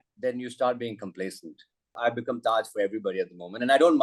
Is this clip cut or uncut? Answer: cut